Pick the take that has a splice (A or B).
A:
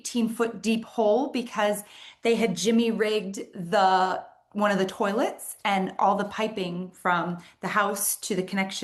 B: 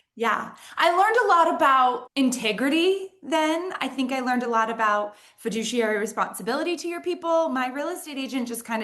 B